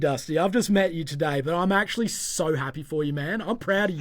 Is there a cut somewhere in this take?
no; 0 cuts

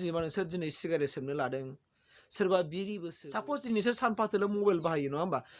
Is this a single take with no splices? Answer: no; 1 cut; at 3.1 s

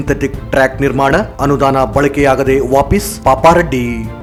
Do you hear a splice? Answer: no; 0 cuts

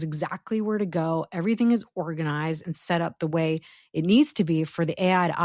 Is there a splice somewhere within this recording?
no; 0 cuts

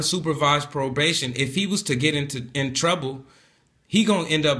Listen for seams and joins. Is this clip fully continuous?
yes; 0 cuts

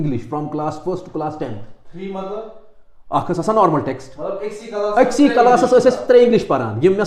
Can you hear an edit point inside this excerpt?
no; 0 cuts

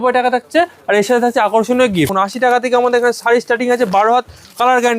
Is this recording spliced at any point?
yes; 1 cut; at 2.1 s

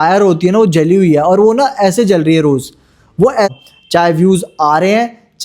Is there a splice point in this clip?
yes; 1 cut; at 3.5 s

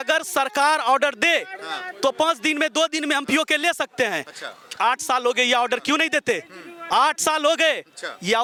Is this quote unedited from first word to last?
yes; 0 cuts

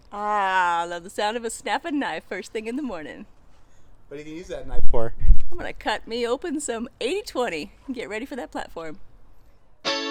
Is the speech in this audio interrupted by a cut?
no; 0 cuts

